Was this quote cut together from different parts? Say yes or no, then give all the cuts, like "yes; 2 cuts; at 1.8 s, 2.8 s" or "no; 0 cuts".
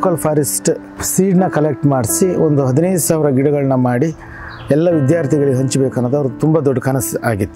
yes; 1 cut; at 1.0 s